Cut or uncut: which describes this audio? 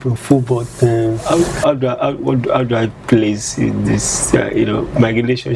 cut